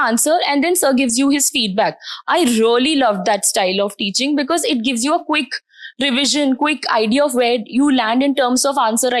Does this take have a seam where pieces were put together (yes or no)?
no